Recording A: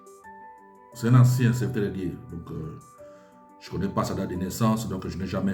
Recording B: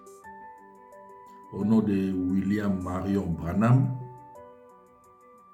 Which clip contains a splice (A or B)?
A